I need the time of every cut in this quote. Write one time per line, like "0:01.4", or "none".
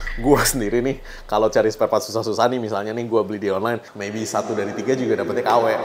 0:03.9